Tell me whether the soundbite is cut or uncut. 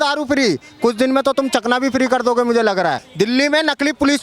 cut